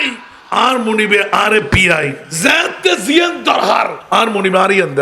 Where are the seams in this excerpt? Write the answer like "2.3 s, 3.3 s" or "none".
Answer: 2.2 s, 4.0 s